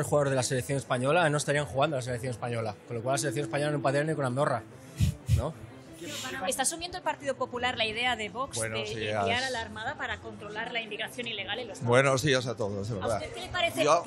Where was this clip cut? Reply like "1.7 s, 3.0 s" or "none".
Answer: 6.5 s